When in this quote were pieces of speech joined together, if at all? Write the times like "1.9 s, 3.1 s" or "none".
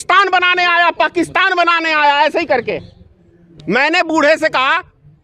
none

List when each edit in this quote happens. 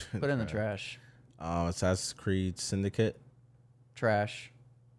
none

